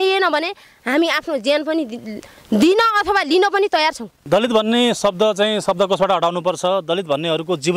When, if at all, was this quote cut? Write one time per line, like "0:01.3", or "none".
0:04.1